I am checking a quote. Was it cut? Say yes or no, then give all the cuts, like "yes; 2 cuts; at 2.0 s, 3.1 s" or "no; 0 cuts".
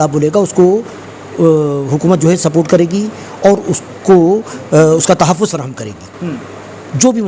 no; 0 cuts